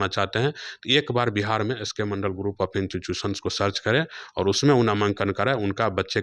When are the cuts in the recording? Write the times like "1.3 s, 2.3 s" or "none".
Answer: none